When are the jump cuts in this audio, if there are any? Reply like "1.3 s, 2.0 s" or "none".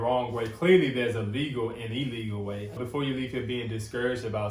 2.7 s